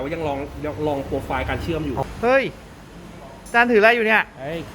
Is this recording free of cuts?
no; 1 cut; at 2.0 s

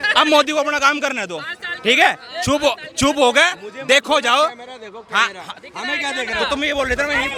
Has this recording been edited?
no; 0 cuts

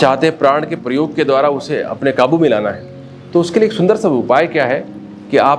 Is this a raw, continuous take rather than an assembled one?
yes; 0 cuts

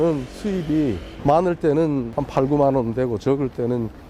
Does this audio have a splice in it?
yes; 2 cuts; at 1.1 s, 2.1 s

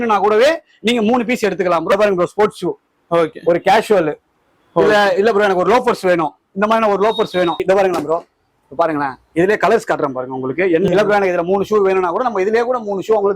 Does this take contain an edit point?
yes; 3 cuts; at 1.9 s, 7.6 s, 10.9 s

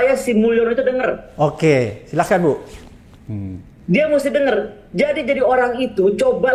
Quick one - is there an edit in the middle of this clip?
no; 0 cuts

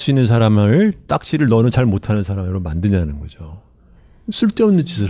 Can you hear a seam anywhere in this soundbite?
no; 0 cuts

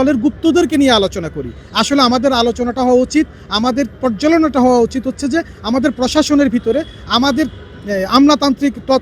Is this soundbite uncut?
yes; 0 cuts

